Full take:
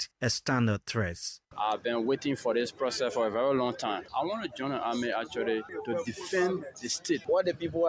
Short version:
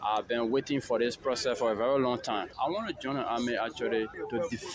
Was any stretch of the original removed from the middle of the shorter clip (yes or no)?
no